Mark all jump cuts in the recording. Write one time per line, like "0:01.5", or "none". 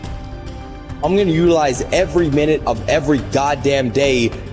0:01.0